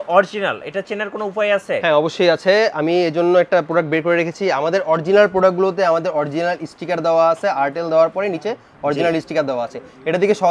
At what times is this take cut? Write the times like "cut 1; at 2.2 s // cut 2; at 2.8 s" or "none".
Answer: none